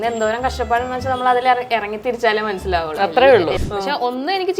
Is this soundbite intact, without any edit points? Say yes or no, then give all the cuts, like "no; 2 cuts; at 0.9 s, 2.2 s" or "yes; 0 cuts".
no; 1 cut; at 3.6 s